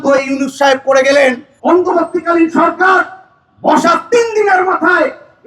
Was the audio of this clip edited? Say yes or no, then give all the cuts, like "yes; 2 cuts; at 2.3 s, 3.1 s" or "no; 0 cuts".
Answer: yes; 1 cut; at 1.5 s